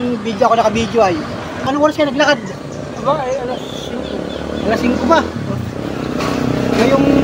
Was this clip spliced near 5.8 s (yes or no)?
no